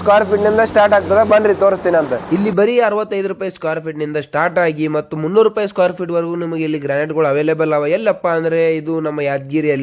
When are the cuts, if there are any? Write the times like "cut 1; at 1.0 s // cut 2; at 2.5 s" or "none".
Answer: none